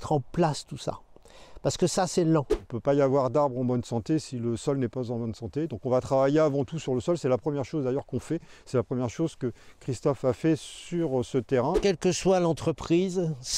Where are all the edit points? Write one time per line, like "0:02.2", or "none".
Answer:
0:02.6
0:11.8